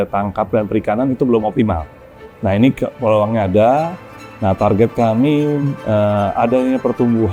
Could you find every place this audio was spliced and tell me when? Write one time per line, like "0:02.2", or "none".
none